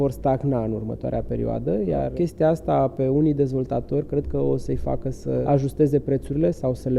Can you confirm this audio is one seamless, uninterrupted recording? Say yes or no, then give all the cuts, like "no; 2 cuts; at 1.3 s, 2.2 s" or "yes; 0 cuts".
no; 2 cuts; at 2.1 s, 5.4 s